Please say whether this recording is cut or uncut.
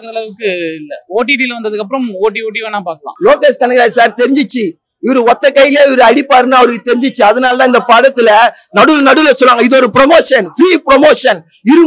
cut